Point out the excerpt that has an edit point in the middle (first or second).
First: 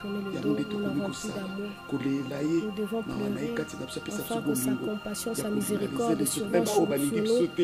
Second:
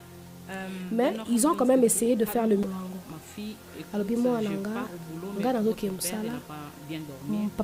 second